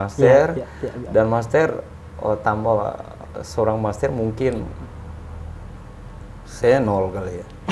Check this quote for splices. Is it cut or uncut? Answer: uncut